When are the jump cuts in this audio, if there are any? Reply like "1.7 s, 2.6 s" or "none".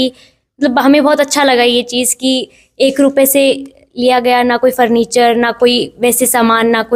none